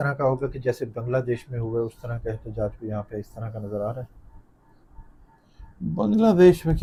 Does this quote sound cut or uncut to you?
uncut